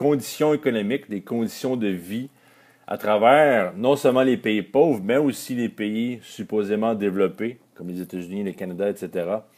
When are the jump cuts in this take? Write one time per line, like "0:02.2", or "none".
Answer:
none